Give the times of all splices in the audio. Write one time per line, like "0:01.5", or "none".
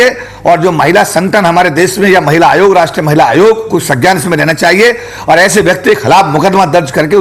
none

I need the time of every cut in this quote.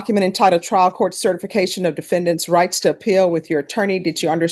none

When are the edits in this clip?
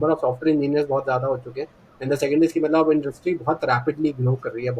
none

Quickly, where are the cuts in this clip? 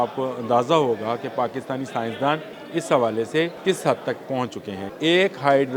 0:02.6
0:03.6
0:04.8

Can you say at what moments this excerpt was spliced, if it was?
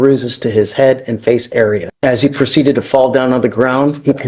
0:01.9

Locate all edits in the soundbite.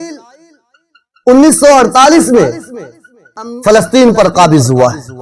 0:03.4

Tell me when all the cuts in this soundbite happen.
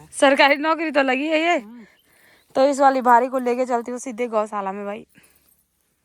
none

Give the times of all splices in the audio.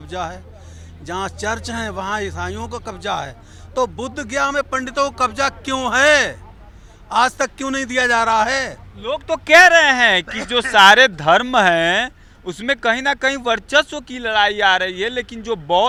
none

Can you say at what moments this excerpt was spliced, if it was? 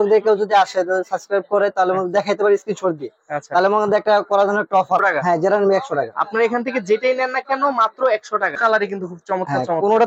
0:05.0
0:08.6

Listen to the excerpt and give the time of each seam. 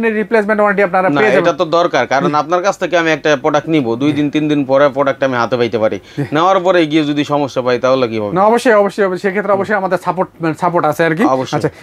none

